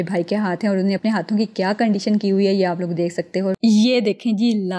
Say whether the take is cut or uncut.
cut